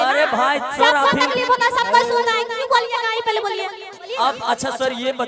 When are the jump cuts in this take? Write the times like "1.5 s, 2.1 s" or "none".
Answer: 4.1 s